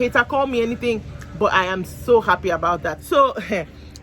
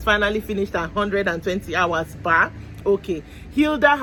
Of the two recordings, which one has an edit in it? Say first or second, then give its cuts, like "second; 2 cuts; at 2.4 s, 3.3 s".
first; 1 cut; at 2.9 s